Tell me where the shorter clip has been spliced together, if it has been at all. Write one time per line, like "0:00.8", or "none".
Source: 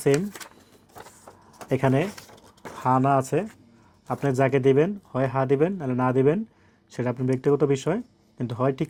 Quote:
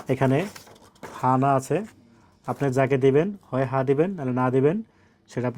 none